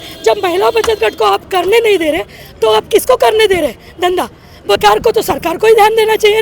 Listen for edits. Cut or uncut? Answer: uncut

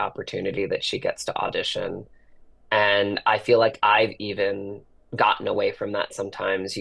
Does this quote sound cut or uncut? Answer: uncut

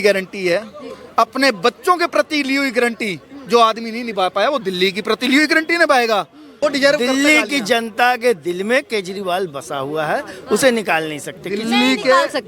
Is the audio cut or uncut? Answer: cut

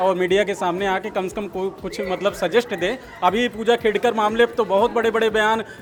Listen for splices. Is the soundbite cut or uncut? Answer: uncut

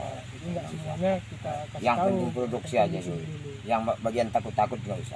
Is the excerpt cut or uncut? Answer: uncut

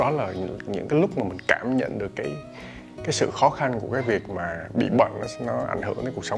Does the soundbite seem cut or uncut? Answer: uncut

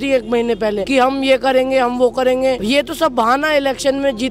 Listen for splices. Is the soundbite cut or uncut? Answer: cut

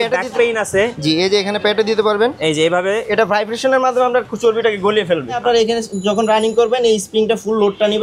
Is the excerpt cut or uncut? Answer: cut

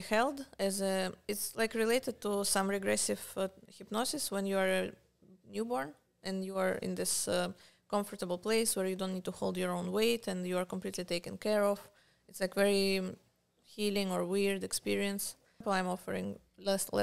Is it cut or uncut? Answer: cut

